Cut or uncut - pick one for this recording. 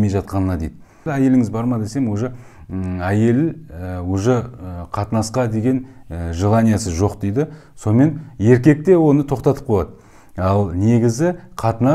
cut